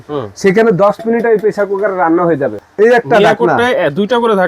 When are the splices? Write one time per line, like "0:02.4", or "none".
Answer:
0:02.6